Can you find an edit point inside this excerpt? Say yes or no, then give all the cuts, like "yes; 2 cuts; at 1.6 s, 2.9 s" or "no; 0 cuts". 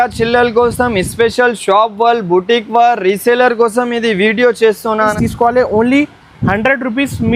yes; 1 cut; at 5.1 s